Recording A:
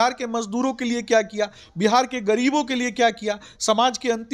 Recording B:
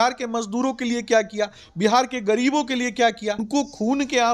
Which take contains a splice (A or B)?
B